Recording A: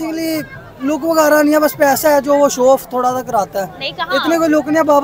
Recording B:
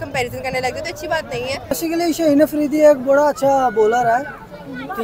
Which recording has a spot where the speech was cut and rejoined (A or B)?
B